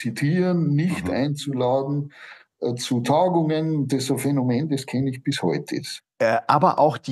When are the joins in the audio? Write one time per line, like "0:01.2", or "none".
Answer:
0:05.9